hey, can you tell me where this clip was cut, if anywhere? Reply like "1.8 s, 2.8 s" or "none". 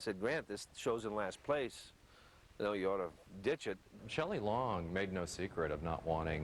3.9 s

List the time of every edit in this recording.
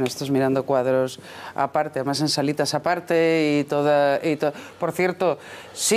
1.0 s

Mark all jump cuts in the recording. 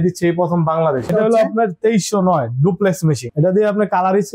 1.1 s, 3.3 s

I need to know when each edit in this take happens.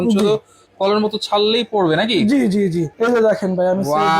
2.9 s

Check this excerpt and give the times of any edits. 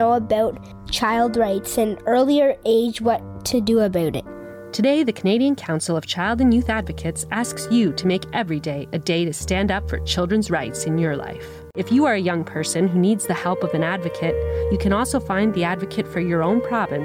11.8 s

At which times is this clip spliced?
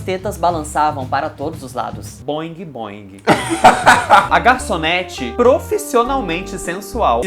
4.3 s

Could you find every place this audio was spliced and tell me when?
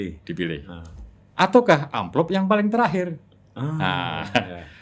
none

